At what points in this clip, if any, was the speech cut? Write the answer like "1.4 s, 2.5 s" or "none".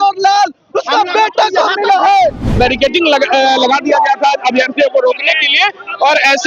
2.5 s